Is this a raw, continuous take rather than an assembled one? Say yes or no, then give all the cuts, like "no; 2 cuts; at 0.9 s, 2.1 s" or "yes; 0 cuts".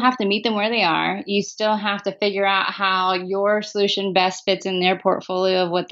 yes; 0 cuts